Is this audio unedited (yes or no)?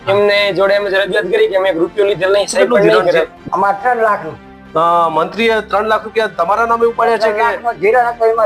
no